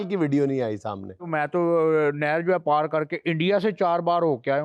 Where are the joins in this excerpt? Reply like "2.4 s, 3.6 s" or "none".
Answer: 1.3 s